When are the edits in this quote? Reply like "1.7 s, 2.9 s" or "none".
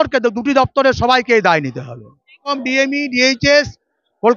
2.5 s